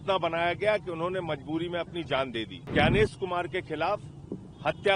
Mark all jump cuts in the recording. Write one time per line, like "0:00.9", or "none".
0:02.7

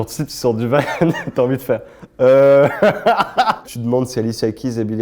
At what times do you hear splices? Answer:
0:03.7

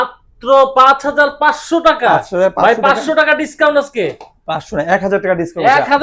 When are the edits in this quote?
none

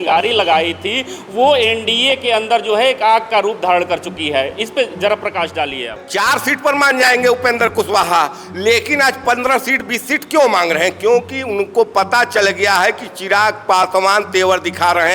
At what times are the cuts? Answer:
0:06.0

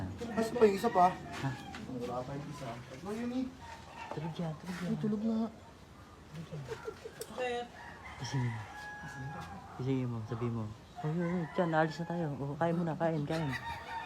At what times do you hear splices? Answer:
none

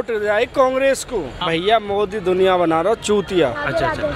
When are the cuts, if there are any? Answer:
0:01.4

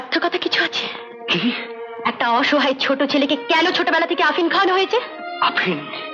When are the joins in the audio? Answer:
0:01.9

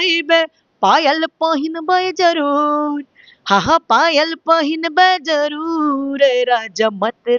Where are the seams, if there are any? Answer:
none

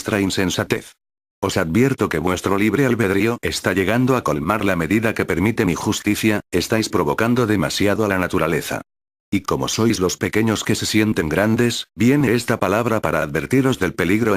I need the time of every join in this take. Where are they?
none

